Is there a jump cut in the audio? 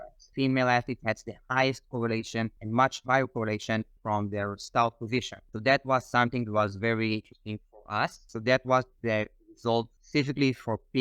yes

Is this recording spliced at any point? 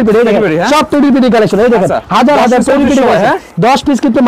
no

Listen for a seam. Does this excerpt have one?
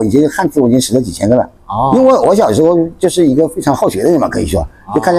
no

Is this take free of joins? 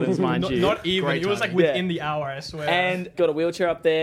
no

